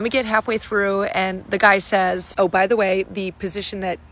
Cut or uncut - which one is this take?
uncut